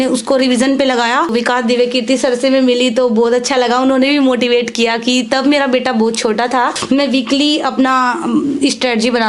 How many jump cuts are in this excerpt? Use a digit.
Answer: 2